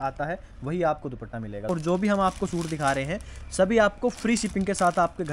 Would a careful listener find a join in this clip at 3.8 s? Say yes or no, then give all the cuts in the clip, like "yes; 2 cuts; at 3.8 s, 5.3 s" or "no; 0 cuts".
no; 1 cut; at 1.7 s